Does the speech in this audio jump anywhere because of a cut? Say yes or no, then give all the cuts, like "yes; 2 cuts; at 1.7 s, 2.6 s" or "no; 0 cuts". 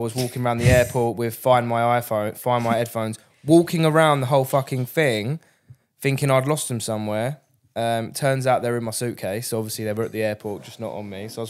no; 0 cuts